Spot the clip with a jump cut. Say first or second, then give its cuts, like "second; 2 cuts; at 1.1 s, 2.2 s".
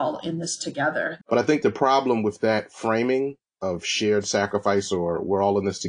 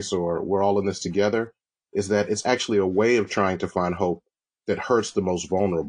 first; 1 cut; at 1.2 s